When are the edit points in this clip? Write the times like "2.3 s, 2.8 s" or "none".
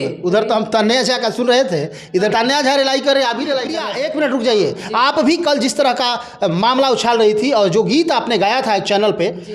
2.3 s, 3.8 s